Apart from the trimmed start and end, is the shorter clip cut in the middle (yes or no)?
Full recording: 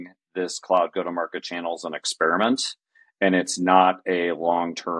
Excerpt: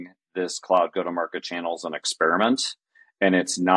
no